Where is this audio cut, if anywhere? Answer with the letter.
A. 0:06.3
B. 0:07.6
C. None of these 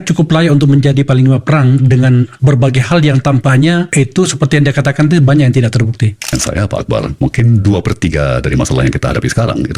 A